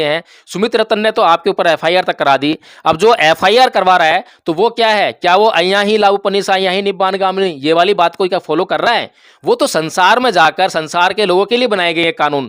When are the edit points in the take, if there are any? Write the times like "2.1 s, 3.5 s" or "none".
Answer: none